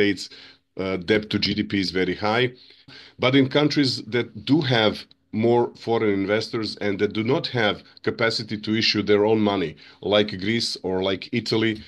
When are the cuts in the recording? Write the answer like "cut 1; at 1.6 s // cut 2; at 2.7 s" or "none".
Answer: cut 1; at 2.9 s